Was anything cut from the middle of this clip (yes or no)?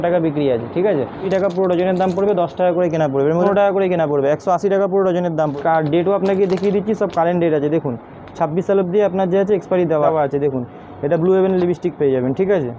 yes